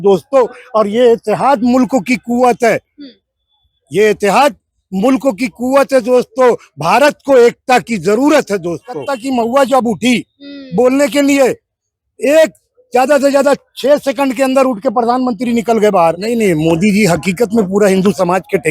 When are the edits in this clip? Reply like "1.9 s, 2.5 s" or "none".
9.1 s, 16.2 s